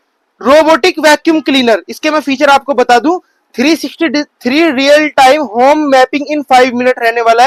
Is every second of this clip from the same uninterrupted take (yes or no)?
yes